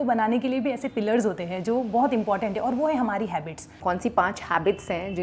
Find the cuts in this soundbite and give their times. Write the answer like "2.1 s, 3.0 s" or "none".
3.6 s